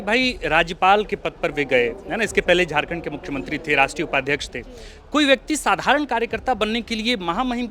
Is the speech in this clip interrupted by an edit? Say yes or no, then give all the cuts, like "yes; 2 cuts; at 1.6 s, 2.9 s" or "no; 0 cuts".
no; 0 cuts